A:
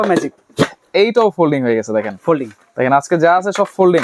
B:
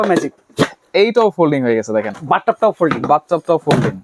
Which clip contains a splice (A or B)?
B